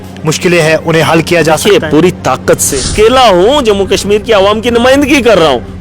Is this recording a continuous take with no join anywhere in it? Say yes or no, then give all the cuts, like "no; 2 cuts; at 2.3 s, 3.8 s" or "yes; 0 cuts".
no; 1 cut; at 2.7 s